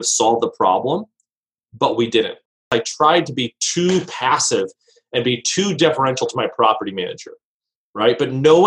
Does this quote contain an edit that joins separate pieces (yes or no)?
yes